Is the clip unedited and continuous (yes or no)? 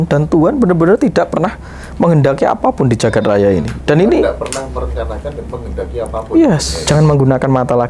no